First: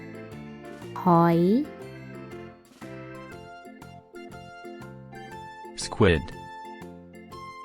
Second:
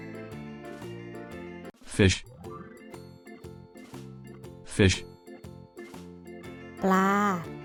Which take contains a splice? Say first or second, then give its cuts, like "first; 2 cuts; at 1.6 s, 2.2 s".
first; 1 cut; at 0.9 s